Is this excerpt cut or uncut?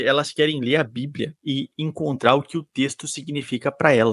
uncut